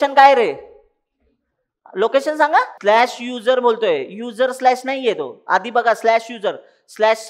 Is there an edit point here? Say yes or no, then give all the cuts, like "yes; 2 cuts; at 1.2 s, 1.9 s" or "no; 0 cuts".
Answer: yes; 1 cut; at 2.7 s